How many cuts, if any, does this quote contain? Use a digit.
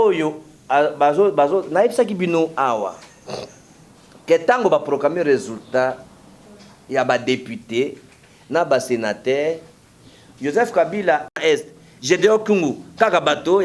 1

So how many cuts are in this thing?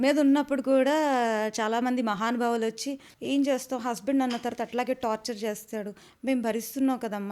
1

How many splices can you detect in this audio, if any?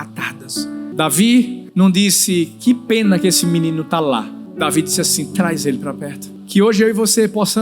4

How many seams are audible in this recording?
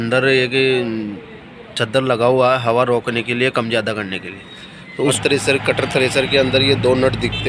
1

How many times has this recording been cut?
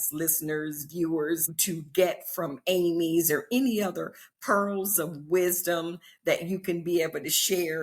1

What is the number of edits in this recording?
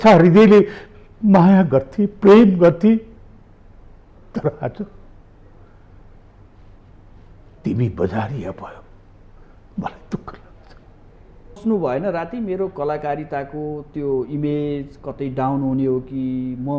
1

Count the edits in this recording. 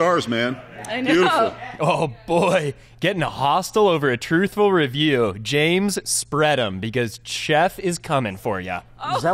0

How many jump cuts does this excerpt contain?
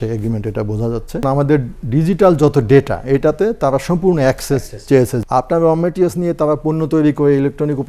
2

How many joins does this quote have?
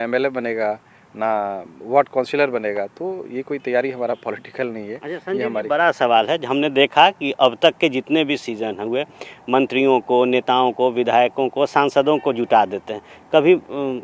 0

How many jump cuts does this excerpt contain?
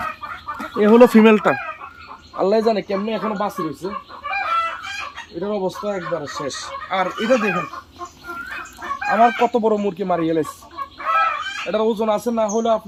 0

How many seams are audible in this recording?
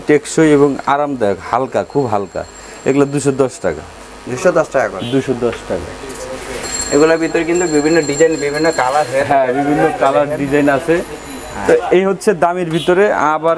0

